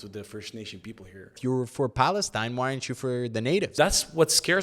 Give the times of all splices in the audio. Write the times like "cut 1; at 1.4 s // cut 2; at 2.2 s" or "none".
cut 1; at 1.4 s // cut 2; at 3.8 s